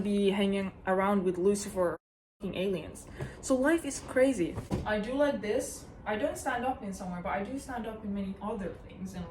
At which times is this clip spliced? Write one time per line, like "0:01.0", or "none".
0:04.7